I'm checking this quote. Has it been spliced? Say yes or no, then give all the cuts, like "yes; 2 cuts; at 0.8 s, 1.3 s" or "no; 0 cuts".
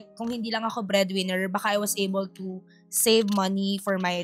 no; 0 cuts